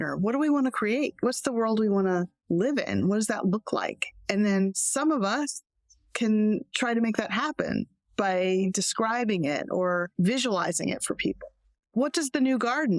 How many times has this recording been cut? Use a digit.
1